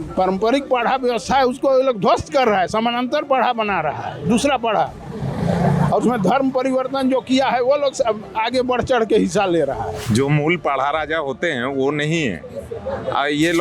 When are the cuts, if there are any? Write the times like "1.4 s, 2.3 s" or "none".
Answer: 10.0 s